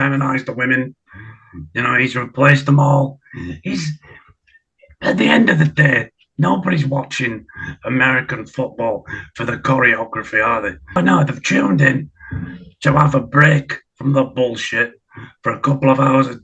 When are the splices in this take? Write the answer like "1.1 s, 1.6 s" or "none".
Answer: 10.9 s